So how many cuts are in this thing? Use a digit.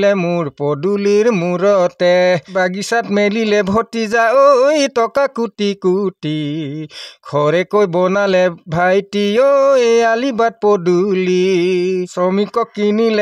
2